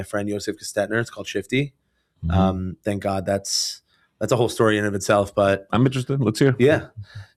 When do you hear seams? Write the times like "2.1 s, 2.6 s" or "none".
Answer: none